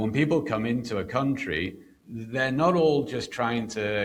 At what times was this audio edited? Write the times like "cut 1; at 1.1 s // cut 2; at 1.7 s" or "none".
none